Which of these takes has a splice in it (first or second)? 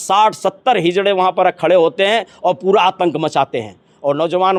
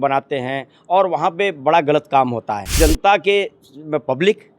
second